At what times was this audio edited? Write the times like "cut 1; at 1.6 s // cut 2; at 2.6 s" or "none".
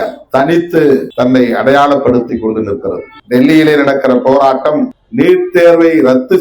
cut 1; at 1.1 s // cut 2; at 3.1 s // cut 3; at 5.0 s